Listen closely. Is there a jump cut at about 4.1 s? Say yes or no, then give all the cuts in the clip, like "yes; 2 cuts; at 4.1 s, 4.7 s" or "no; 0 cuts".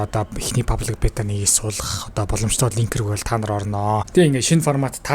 yes; 1 cut; at 4.1 s